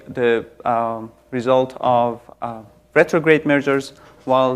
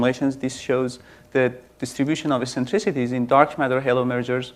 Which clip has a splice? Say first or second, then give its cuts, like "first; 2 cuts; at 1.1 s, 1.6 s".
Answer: second; 1 cut; at 2.4 s